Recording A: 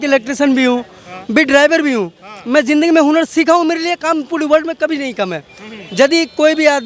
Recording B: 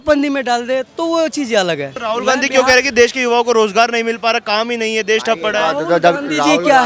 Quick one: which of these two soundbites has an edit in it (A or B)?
B